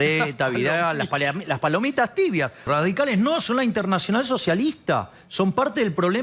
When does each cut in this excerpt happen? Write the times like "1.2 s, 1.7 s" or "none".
2.6 s